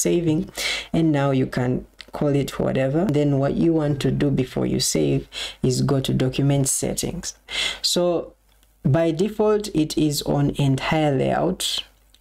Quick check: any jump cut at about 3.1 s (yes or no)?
yes